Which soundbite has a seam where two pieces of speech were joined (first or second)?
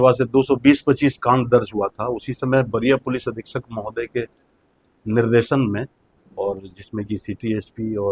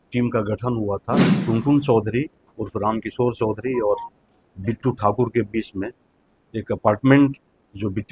second